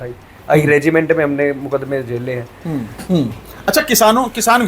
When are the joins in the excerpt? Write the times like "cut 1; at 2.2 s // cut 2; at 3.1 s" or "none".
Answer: cut 1; at 2.9 s